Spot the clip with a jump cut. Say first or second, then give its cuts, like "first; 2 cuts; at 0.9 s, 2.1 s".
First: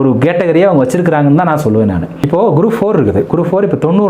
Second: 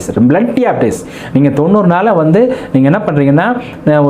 first; 1 cut; at 2.2 s